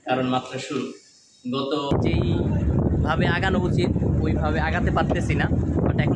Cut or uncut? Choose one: cut